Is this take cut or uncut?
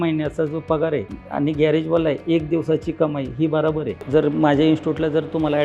cut